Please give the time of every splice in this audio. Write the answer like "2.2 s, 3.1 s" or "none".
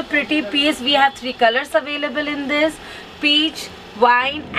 none

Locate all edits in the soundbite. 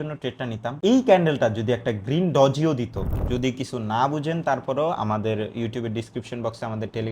3.1 s

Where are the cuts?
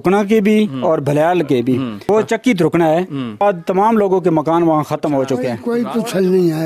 2.0 s, 3.4 s, 5.6 s

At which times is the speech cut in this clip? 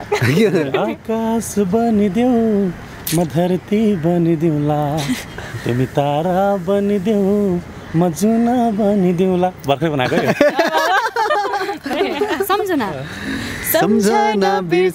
11.9 s

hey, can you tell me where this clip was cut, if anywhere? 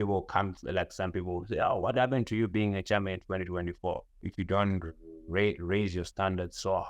4.2 s

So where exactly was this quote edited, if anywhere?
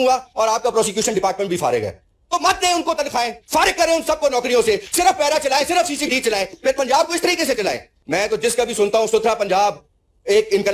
7.9 s

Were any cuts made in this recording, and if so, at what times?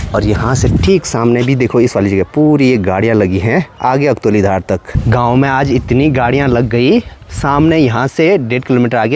none

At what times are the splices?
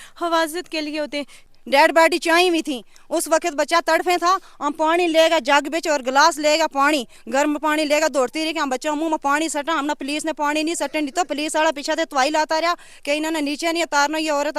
1.4 s

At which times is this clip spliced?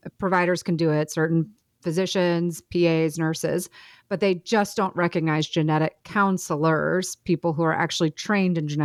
none

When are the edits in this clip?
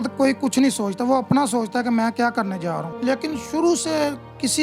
2.9 s

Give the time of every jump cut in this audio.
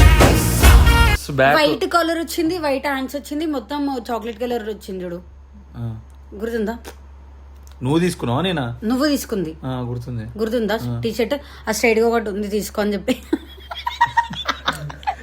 1.2 s

